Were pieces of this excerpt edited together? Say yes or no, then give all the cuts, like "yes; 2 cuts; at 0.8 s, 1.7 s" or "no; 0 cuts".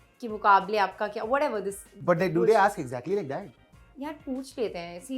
no; 0 cuts